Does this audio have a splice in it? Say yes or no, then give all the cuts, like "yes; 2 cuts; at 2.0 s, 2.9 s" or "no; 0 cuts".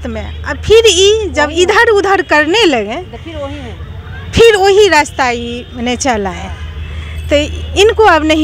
no; 0 cuts